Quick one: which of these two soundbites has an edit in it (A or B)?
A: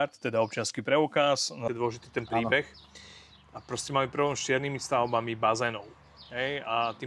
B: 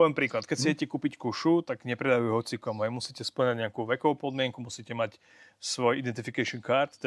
A